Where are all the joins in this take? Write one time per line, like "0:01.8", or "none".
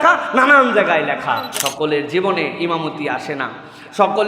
0:01.5